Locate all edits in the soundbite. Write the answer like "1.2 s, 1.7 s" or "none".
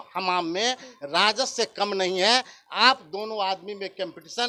none